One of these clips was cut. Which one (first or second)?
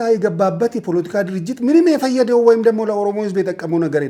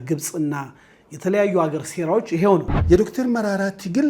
second